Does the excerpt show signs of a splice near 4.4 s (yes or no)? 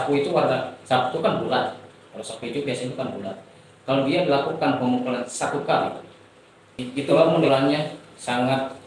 no